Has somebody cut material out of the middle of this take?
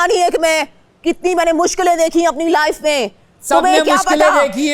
no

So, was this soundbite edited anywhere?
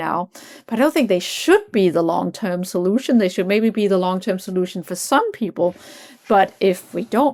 no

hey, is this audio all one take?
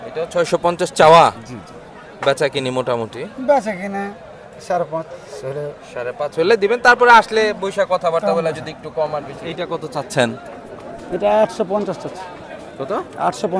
no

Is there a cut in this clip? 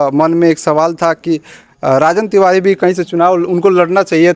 no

